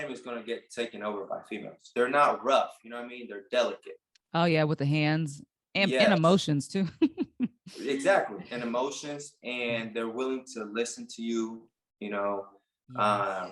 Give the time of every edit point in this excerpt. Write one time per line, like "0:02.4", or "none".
0:01.8